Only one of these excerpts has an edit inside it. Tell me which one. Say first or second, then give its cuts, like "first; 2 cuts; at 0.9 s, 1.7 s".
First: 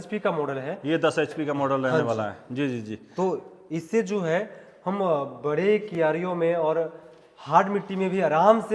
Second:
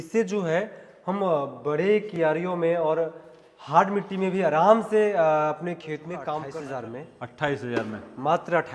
second; 1 cut; at 6.4 s